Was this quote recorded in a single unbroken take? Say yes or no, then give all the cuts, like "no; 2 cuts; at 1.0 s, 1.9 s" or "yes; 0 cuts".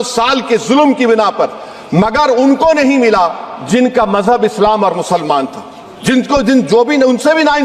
yes; 0 cuts